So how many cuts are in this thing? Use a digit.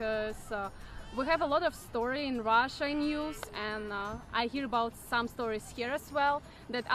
0